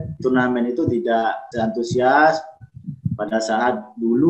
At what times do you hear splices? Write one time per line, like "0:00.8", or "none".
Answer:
0:01.4